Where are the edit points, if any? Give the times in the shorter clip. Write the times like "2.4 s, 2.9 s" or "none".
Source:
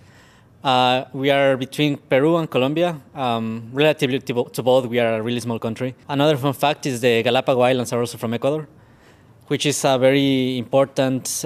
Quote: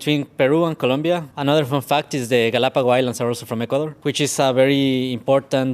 1.3 s, 3.9 s